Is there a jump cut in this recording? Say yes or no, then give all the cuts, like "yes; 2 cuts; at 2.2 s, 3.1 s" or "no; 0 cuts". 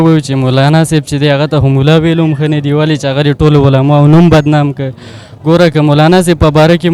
no; 0 cuts